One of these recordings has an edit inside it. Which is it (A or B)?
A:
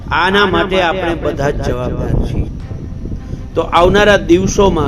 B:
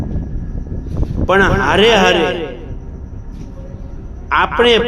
A